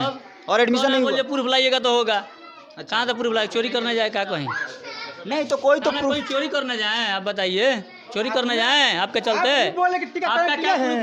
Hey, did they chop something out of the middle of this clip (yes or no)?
no